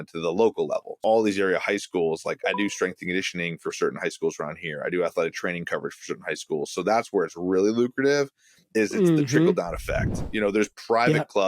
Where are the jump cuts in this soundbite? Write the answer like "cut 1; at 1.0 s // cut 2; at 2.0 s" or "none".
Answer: cut 1; at 1.0 s